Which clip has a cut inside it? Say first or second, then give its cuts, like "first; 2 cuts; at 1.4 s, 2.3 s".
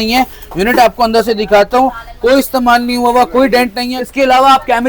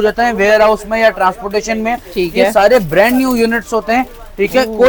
first; 1 cut; at 3.9 s